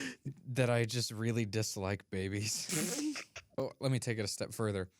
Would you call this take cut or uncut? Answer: cut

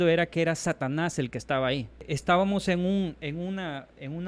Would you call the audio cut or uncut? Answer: cut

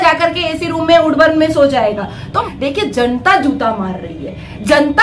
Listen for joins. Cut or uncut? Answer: cut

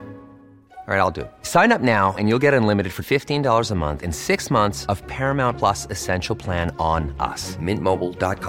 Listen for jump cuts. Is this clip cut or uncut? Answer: uncut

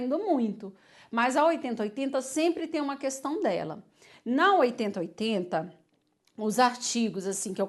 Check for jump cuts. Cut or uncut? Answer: uncut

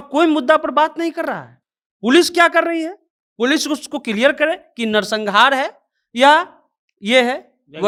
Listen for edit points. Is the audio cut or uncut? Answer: uncut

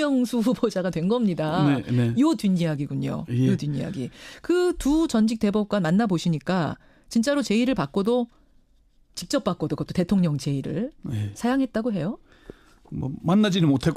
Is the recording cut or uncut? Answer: uncut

